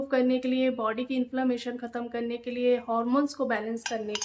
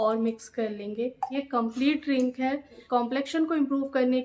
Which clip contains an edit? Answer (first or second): second